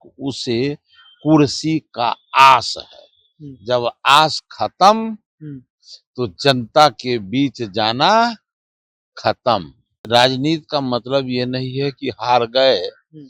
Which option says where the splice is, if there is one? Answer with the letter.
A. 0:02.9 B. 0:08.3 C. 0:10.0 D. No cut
C